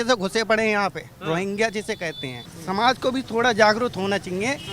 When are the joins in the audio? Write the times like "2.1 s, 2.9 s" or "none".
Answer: 2.5 s

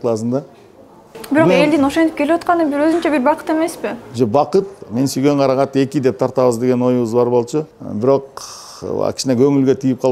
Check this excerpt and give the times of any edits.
4.8 s, 7.8 s

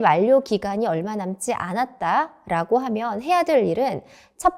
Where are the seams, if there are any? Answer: none

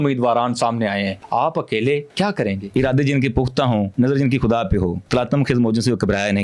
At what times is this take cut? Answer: 1.2 s, 2.4 s, 3.9 s, 5.0 s

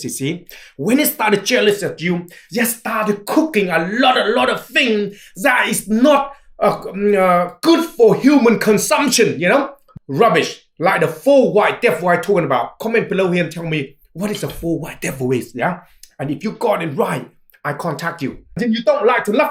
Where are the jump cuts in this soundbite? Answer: 9.8 s, 18.5 s

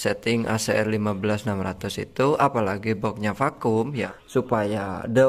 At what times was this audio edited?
4.1 s

